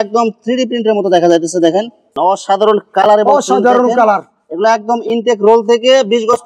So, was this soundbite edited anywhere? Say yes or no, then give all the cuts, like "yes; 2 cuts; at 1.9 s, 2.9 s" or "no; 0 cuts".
yes; 1 cut; at 2.0 s